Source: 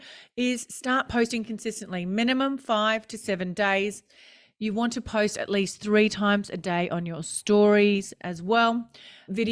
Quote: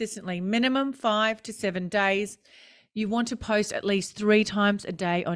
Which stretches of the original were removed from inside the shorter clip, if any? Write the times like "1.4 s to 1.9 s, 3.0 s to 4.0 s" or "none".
none